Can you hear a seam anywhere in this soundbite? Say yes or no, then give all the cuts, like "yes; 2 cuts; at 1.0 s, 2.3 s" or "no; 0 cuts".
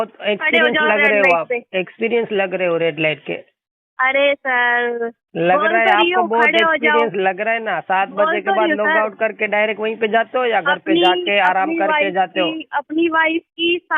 no; 0 cuts